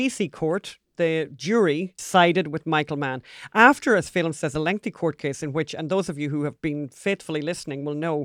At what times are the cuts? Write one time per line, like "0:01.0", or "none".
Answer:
0:01.9